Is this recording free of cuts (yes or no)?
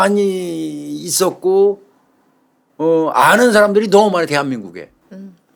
yes